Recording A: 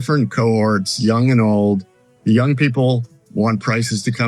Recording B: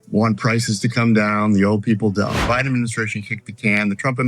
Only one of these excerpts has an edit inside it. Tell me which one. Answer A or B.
B